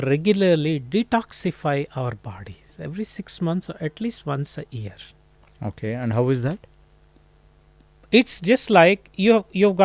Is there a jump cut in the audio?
no; 0 cuts

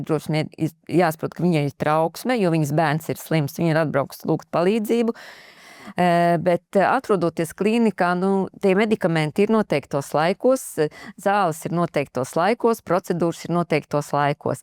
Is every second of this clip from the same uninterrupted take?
no; 1 cut; at 5.6 s

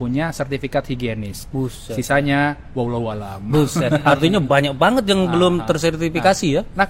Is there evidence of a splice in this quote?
no; 0 cuts

